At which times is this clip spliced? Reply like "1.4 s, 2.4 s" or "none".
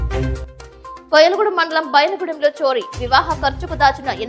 1.0 s